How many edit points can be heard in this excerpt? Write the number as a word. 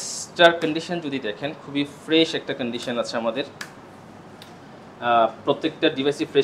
zero